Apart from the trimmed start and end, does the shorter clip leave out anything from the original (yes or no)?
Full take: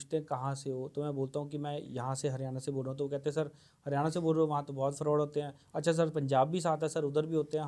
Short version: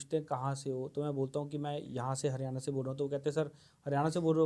no